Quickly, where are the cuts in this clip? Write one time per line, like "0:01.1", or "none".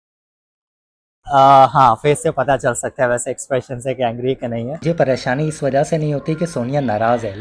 0:04.8